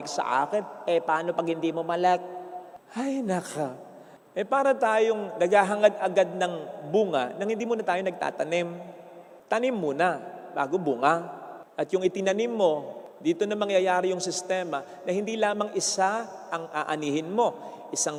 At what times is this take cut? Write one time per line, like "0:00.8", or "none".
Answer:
none